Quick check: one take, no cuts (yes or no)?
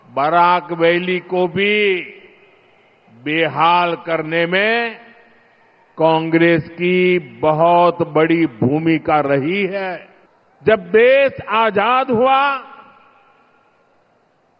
no